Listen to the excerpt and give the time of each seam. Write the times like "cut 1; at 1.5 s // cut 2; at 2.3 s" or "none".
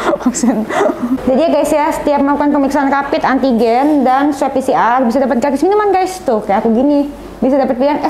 cut 1; at 1.2 s

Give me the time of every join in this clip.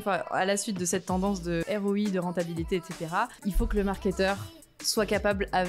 cut 1; at 1.6 s // cut 2; at 3.4 s

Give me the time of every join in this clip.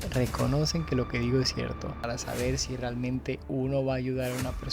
cut 1; at 2.0 s

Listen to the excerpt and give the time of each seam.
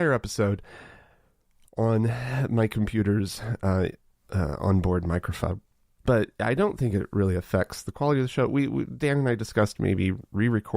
cut 1; at 6.0 s

